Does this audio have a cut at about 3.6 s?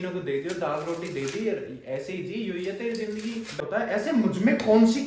yes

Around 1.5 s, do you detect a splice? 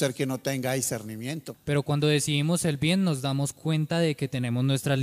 yes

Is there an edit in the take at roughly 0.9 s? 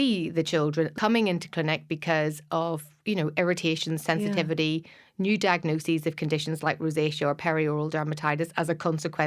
yes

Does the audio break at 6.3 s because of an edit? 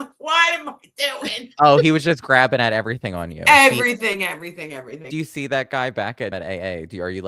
yes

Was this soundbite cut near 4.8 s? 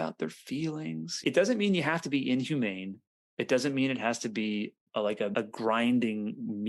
no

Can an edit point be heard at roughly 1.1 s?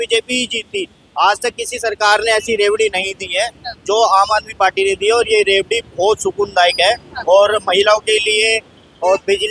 no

